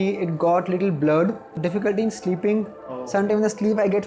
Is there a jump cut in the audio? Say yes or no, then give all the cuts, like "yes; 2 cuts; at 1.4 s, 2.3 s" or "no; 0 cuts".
yes; 1 cut; at 1.6 s